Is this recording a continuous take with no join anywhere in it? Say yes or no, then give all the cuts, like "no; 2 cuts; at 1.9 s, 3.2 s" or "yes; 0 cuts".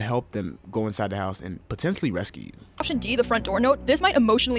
no; 1 cut; at 2.9 s